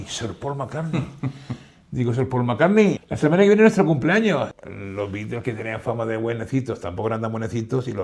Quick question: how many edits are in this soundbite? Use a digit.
2